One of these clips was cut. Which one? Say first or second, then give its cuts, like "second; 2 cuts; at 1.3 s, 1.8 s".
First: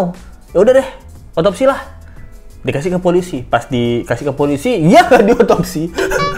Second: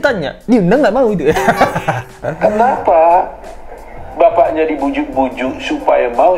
second; 1 cut; at 2.2 s